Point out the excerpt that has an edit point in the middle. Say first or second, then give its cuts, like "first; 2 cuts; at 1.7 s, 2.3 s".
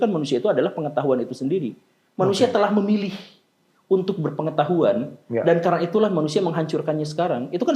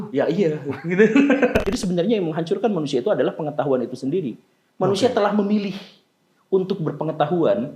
second; 1 cut; at 1.6 s